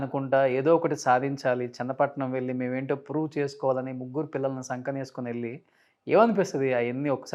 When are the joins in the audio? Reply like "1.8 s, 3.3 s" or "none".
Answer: none

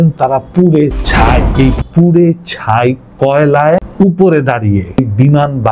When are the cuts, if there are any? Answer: 1.5 s, 3.9 s, 5.0 s

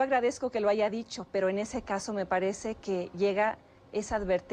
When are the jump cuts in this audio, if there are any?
none

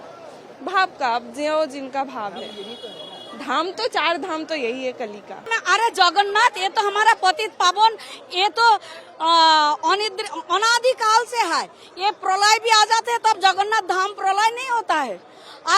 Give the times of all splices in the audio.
5.5 s

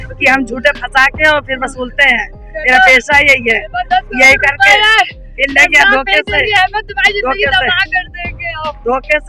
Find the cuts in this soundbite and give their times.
none

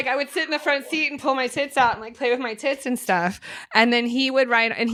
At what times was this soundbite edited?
none

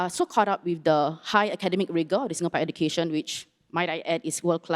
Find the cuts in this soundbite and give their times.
none

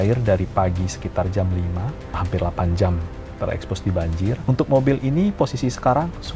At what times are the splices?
2.2 s, 4.4 s

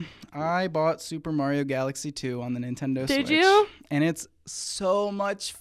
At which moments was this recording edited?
none

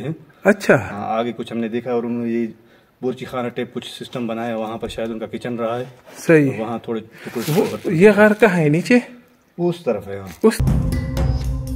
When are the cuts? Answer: none

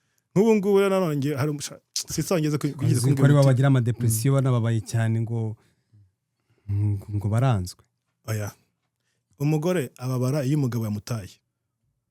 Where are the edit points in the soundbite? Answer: none

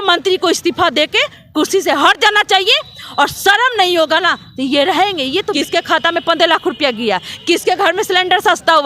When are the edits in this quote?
5.5 s

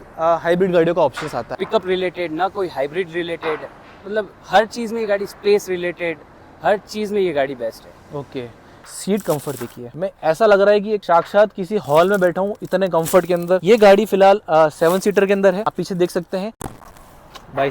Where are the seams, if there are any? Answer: 1.6 s, 8.8 s, 16.5 s

